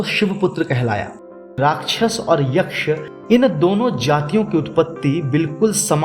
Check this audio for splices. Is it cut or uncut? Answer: cut